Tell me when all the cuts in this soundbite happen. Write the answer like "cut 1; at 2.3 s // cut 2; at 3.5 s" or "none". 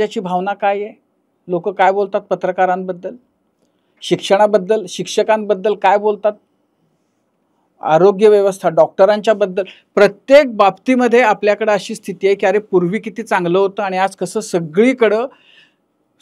none